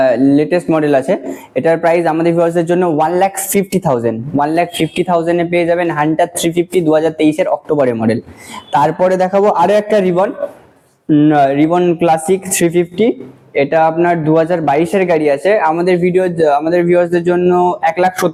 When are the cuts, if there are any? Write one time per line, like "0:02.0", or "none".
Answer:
none